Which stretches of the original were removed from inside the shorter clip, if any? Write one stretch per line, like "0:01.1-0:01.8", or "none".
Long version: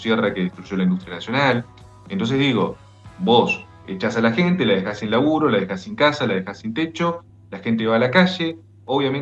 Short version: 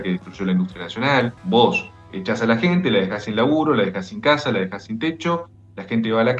0:01.7-0:03.1